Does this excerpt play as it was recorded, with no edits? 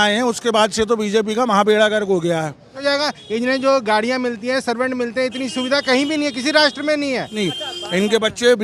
no; 2 cuts; at 2.7 s, 7.3 s

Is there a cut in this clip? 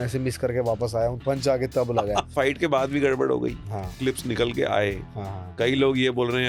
yes; 3 cuts; at 1.2 s, 2.3 s, 4.0 s

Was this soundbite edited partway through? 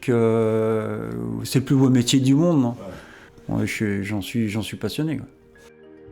no; 0 cuts

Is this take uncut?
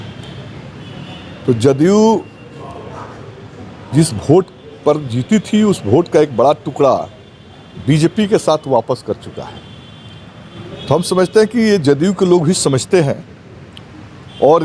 yes; 0 cuts

